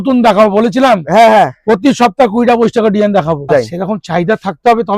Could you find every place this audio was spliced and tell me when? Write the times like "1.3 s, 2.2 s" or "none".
3.5 s